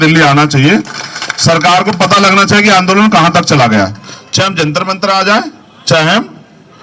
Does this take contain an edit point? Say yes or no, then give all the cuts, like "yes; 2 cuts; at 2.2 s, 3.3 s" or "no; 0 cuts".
no; 0 cuts